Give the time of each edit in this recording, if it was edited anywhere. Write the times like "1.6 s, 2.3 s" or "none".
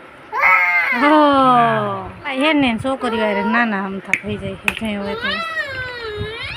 2.3 s